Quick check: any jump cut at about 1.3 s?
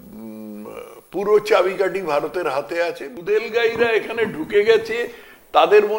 no; 1 cut; at 3.1 s

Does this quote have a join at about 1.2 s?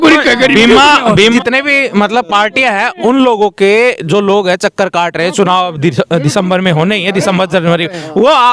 yes; 1 cut; at 1.2 s

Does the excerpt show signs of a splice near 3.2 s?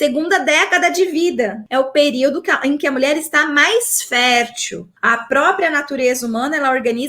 no; 2 cuts; at 1.6 s, 4.9 s

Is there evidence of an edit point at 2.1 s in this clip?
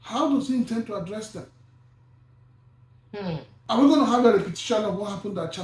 no; 1 cut; at 3.5 s

